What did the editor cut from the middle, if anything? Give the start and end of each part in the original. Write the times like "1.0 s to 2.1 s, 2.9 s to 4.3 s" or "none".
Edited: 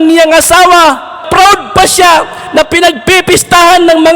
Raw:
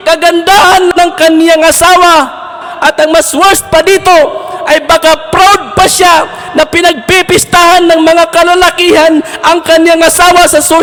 2.5 s to 5.3 s